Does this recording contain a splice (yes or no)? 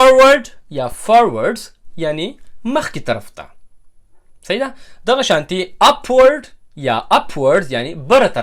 no